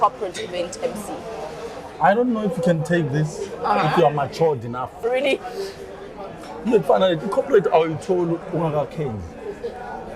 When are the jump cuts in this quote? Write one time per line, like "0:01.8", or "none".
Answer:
0:04.9